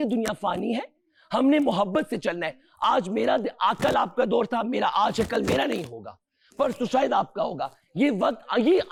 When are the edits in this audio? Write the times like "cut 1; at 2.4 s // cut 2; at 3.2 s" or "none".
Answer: none